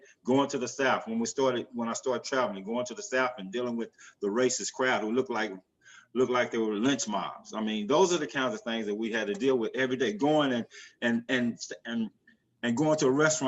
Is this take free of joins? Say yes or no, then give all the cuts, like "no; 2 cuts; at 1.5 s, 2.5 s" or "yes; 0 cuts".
yes; 0 cuts